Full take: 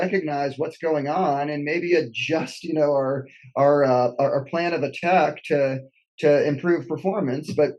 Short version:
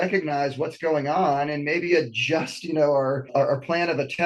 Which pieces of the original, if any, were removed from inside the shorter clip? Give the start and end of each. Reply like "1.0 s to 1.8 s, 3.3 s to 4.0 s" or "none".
3.3 s to 4.1 s